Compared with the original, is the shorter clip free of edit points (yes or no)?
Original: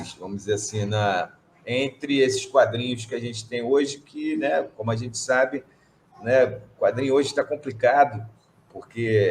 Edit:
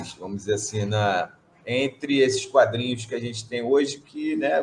yes